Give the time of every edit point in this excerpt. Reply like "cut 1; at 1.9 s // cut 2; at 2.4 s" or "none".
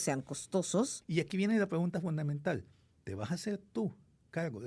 cut 1; at 1.0 s